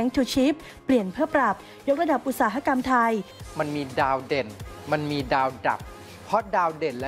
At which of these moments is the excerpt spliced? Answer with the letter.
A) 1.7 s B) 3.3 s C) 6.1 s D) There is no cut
B